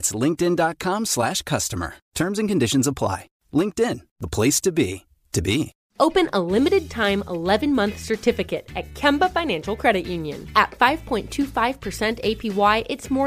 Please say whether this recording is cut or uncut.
cut